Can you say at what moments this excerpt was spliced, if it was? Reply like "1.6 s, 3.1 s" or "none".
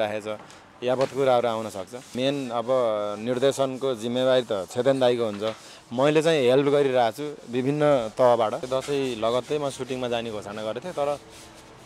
2.1 s, 8.6 s